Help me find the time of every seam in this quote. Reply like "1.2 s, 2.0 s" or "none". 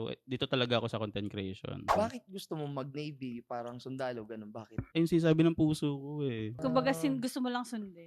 1.9 s, 4.9 s